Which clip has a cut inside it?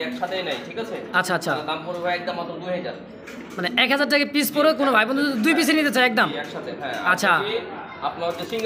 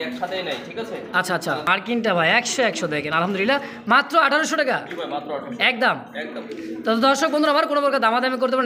second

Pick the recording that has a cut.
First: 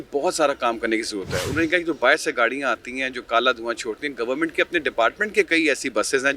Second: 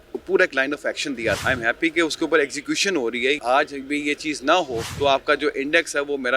second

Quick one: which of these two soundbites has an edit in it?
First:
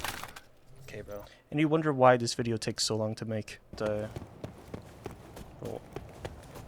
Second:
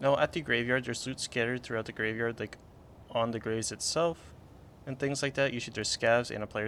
first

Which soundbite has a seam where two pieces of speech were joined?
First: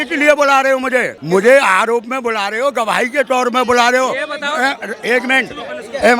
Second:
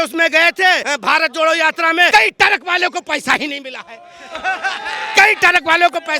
second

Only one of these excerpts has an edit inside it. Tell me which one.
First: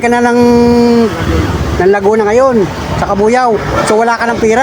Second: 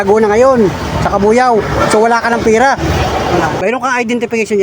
second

